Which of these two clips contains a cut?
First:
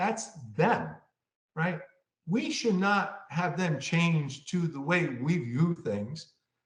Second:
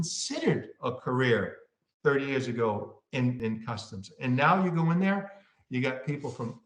second; 1 cut; at 3.4 s

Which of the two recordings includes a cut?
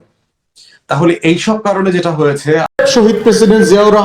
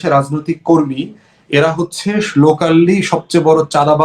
first; 1 cut; at 2.8 s

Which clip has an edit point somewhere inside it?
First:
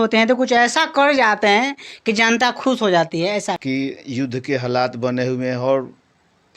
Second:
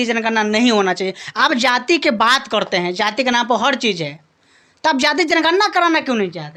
first; 1 cut; at 3.6 s

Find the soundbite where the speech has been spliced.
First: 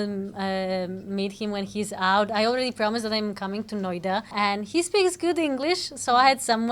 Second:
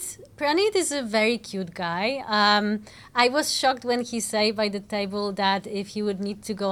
first; 1 cut; at 4.3 s

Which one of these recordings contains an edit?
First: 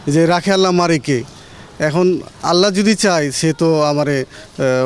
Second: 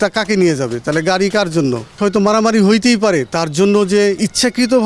second; 1 cut; at 1.9 s

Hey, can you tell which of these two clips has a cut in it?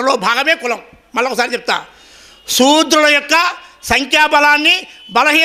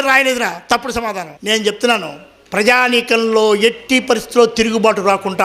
second; 1 cut; at 1.3 s

